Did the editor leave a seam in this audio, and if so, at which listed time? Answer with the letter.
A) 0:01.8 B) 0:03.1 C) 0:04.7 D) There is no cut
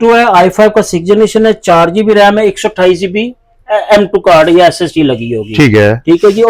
D